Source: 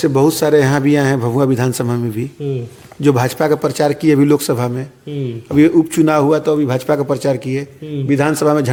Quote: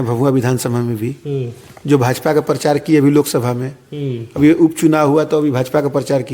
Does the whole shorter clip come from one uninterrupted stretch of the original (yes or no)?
yes